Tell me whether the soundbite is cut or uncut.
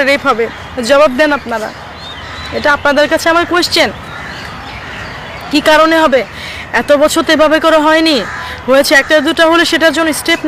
uncut